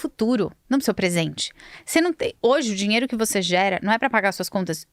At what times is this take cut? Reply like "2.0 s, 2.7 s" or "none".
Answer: none